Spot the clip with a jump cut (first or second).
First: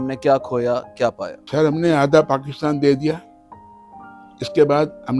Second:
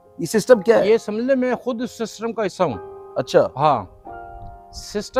first